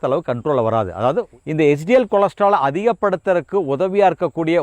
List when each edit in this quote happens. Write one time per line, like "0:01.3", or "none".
0:01.3